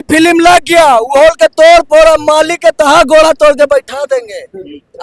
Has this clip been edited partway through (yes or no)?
no